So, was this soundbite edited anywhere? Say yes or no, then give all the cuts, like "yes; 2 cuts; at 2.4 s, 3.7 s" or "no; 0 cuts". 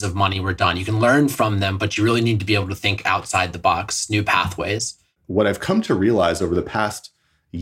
yes; 1 cut; at 5.1 s